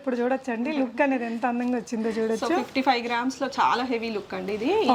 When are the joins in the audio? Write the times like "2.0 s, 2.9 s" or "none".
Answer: none